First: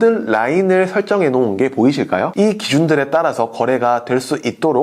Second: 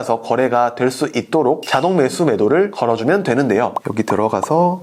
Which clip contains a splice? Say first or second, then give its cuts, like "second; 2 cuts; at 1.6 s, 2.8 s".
first; 1 cut; at 2.3 s